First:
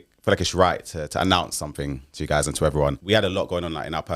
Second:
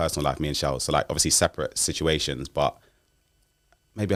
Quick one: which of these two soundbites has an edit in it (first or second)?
first